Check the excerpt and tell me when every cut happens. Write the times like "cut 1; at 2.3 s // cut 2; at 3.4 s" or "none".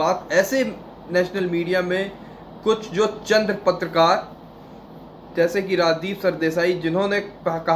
none